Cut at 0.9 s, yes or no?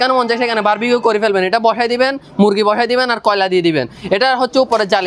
no